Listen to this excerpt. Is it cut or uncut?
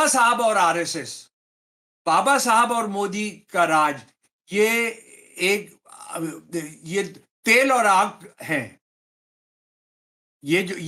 uncut